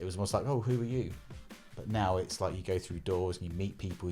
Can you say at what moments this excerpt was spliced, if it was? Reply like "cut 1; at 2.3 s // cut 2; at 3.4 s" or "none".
none